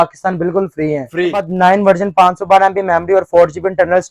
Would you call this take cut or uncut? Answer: cut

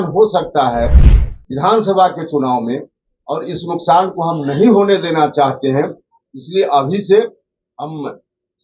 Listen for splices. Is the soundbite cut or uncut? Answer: uncut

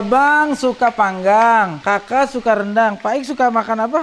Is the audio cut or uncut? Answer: cut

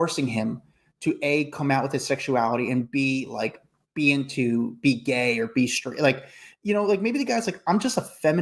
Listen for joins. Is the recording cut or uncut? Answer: uncut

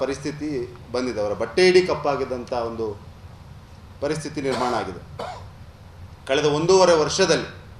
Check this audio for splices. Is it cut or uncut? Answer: uncut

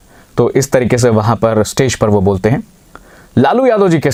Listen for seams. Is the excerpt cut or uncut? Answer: uncut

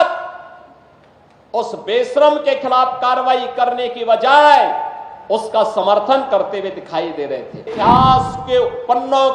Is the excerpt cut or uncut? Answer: cut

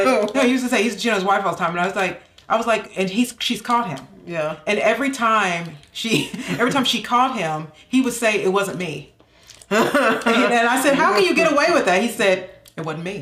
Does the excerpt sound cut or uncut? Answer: uncut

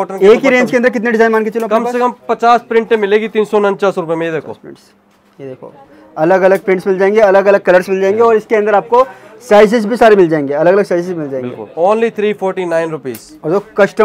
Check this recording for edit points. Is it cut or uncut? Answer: uncut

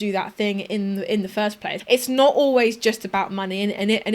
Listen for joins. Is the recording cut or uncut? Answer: cut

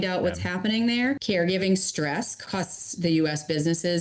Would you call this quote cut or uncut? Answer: cut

